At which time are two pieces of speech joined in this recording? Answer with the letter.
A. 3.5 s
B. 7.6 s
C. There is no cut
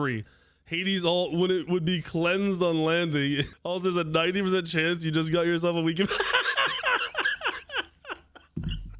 A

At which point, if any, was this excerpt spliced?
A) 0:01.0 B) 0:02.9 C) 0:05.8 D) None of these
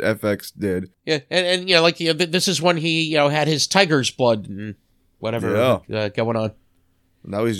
A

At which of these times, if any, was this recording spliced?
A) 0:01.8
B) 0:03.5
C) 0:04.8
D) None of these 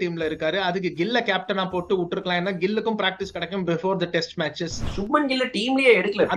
C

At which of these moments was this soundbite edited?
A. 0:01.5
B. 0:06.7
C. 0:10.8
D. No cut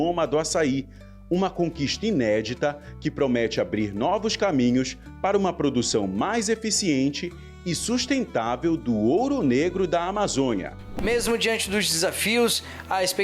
C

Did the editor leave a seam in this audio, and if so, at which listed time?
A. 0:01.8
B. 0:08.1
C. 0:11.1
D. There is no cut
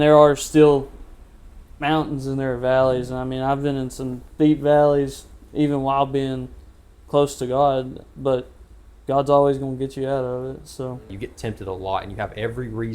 C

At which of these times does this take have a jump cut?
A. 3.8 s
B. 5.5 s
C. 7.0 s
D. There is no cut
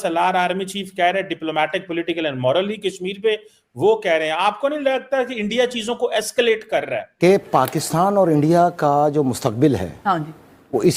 C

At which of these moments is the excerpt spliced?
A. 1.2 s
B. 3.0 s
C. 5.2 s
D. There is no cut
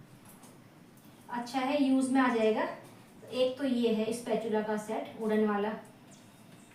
D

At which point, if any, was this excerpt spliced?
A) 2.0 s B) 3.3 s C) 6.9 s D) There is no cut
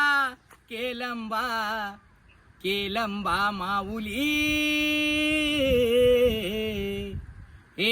D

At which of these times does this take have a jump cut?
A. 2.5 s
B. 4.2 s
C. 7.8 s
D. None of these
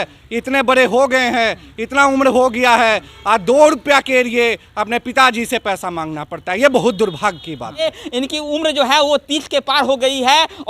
C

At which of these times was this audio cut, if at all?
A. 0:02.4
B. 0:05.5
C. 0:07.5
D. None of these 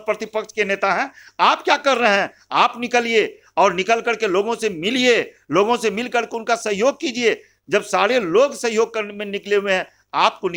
D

